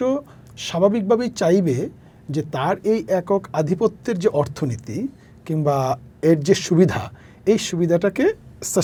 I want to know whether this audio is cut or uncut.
uncut